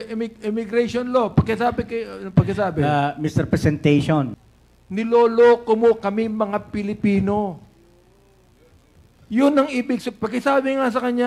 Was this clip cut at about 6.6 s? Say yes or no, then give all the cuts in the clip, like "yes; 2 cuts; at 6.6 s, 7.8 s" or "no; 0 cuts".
no; 1 cut; at 4.4 s